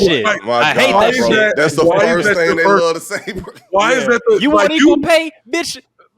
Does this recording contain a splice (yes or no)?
yes